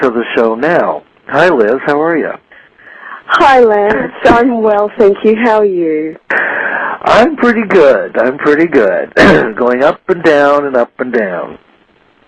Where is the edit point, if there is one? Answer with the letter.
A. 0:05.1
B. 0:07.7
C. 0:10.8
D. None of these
B